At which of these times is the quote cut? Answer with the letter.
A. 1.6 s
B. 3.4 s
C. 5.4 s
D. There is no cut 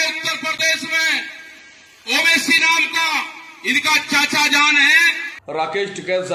C